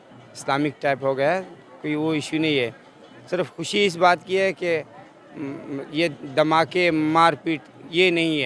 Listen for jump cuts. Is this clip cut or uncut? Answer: uncut